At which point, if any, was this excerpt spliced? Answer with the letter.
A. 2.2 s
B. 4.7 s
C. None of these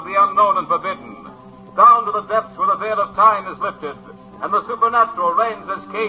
B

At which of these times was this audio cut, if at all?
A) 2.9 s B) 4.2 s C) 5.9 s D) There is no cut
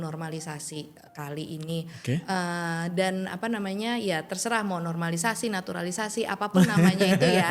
D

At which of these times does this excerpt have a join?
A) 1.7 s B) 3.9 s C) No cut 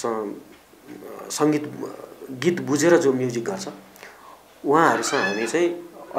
C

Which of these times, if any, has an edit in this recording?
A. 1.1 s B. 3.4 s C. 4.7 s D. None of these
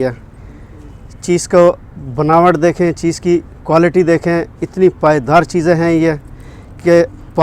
D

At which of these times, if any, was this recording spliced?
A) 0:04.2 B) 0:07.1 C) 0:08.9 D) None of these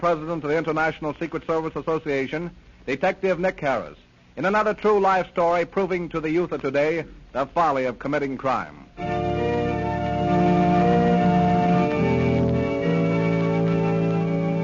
A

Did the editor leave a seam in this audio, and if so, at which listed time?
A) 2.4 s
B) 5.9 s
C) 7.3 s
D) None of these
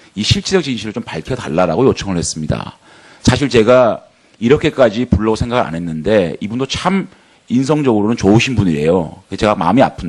A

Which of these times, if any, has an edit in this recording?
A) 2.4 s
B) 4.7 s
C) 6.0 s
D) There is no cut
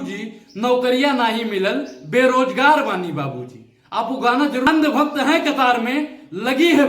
B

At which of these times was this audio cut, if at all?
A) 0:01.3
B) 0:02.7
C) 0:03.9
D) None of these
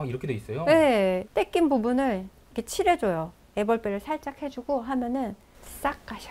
A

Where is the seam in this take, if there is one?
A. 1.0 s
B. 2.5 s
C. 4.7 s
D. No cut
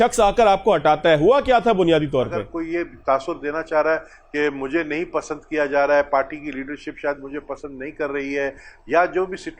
B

